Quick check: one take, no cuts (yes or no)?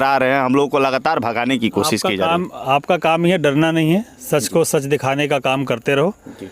yes